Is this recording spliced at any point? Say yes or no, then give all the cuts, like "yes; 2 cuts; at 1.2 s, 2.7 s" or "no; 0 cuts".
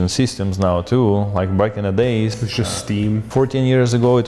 no; 0 cuts